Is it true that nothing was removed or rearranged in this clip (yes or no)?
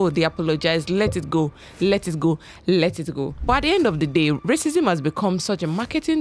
yes